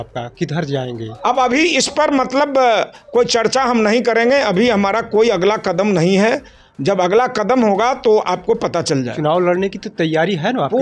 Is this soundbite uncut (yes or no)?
yes